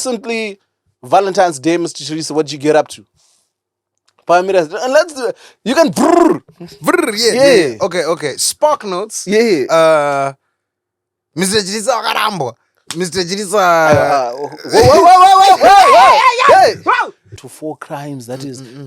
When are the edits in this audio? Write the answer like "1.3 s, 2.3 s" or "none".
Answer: 17.2 s